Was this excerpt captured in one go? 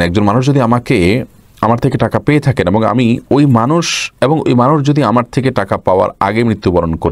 yes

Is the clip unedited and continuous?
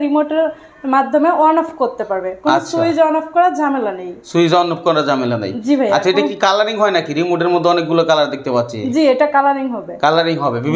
yes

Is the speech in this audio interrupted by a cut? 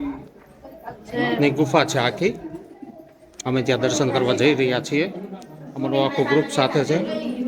no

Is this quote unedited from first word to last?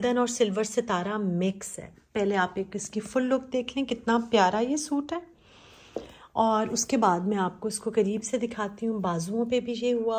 yes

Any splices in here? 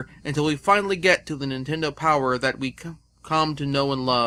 no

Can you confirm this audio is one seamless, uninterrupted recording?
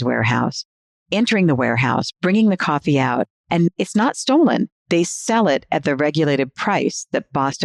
yes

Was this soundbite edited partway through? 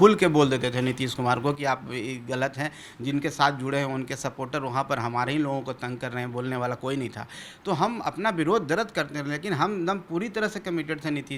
no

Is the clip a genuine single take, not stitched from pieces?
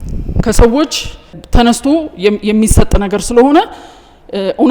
no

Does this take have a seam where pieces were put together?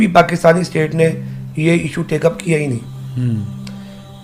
no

